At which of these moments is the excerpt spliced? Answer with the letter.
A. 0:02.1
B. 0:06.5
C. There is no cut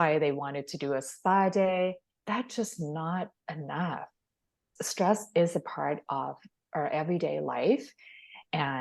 A